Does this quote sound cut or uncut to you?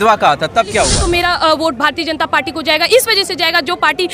cut